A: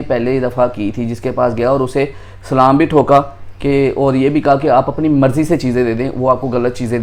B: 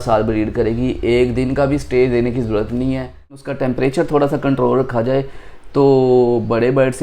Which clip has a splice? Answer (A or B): B